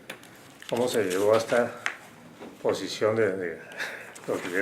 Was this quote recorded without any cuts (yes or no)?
yes